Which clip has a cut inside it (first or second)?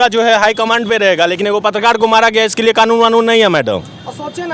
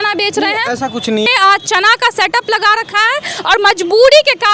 second